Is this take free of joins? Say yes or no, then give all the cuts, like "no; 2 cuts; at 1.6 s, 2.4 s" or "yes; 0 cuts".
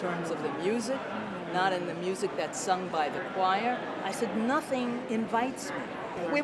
yes; 0 cuts